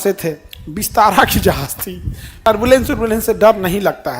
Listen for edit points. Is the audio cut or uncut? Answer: cut